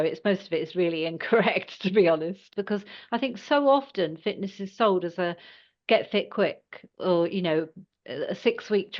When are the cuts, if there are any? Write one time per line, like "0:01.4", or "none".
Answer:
0:02.5